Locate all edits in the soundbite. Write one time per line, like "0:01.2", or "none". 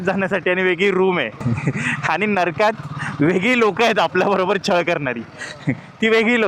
none